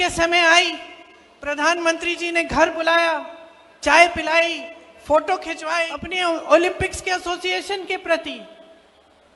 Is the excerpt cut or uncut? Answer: cut